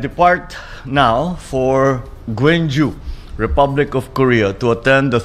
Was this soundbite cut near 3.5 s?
no; 1 cut; at 2.0 s

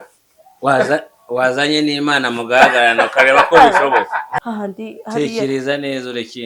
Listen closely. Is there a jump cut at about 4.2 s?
yes; 1 cut; at 4.2 s

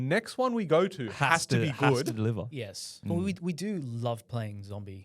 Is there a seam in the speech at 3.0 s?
yes; 1 cut; at 3.0 s

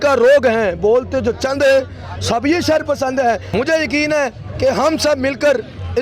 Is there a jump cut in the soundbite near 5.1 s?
no; 1 cut; at 3.5 s

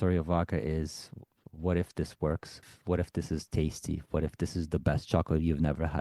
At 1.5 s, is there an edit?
yes; 2 cuts; at 1.5 s, 2.6 s

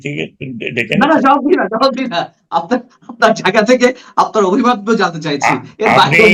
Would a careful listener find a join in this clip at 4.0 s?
no; 0 cuts

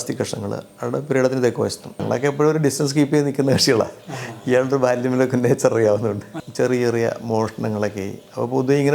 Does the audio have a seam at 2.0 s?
yes; 2 cuts; at 2.0 s, 6.3 s

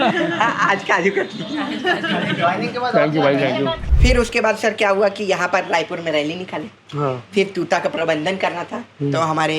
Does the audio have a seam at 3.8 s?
yes; 1 cut; at 3.8 s

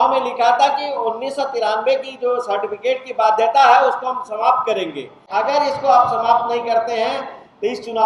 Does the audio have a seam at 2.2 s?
no; 1 cut; at 5.2 s

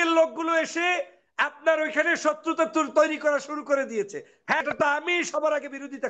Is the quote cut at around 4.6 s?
yes; 1 cut; at 4.6 s

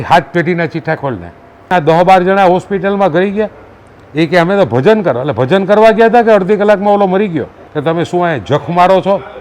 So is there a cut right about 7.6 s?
yes; 2 cuts; at 1.6 s, 7.6 s

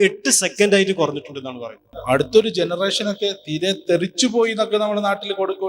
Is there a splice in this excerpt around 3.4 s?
no; 1 cut; at 1.9 s

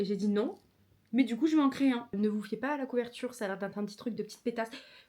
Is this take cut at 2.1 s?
yes; 1 cut; at 2.1 s

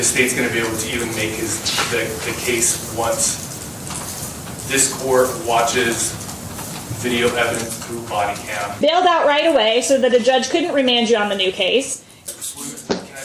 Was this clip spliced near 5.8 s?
no; 2 cuts; at 8.8 s, 12.2 s

